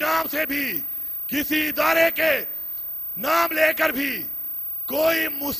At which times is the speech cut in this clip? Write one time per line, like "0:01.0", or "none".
none